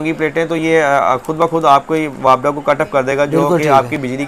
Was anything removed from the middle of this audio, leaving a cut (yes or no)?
no